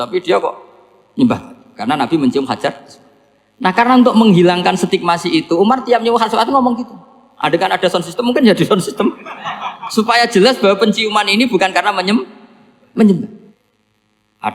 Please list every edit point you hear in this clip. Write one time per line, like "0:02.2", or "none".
0:13.5